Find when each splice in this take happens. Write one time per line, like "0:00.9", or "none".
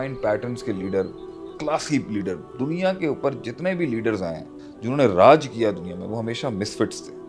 none